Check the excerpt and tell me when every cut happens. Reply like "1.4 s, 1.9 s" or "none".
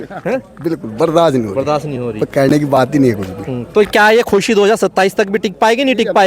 none